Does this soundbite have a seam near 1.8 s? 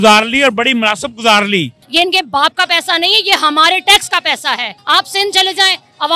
yes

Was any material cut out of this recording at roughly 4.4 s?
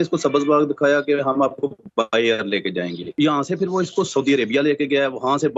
no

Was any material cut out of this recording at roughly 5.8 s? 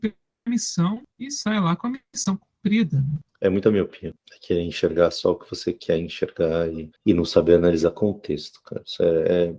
no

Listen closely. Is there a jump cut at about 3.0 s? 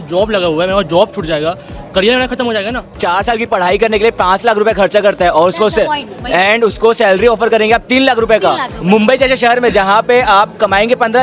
yes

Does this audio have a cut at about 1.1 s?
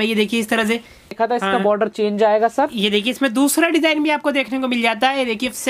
yes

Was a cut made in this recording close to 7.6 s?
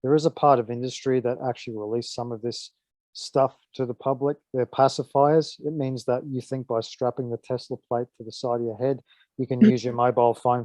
no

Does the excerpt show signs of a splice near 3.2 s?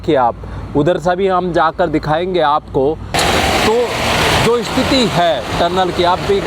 yes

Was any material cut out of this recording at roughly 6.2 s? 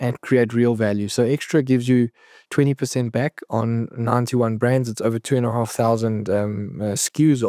no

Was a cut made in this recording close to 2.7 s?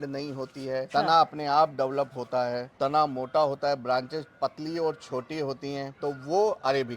yes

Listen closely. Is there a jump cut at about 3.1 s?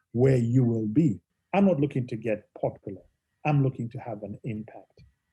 no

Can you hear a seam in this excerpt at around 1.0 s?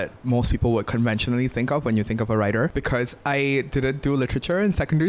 no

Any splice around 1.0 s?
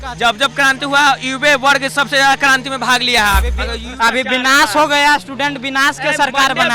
no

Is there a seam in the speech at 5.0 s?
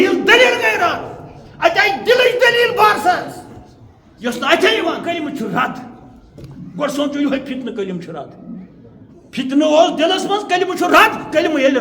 yes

